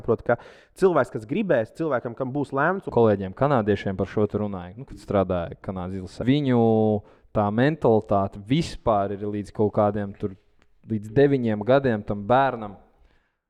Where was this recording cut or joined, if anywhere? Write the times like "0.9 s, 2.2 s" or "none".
2.9 s, 6.2 s